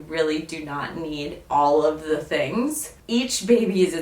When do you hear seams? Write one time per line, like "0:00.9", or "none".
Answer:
0:02.9